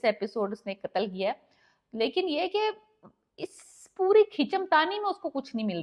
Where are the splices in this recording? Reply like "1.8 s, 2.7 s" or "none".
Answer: none